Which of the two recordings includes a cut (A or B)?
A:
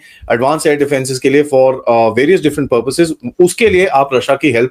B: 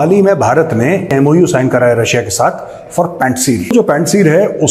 B